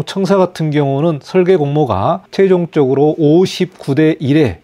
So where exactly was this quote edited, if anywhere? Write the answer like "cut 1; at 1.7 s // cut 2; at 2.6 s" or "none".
cut 1; at 2.2 s